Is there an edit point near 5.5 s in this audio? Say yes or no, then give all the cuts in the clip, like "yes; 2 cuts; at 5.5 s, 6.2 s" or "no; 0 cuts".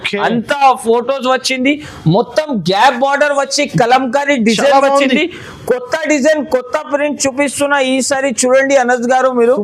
no; 0 cuts